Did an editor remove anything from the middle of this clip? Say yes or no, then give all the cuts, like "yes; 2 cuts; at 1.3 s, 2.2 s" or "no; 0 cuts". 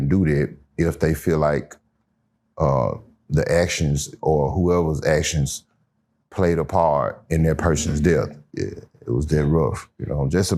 yes; 1 cut; at 8.4 s